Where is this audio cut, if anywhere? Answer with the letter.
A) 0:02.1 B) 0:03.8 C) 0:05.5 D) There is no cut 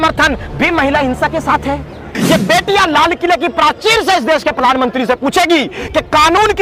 A